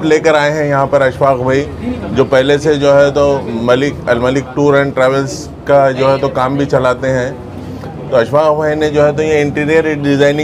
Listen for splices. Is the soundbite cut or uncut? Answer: uncut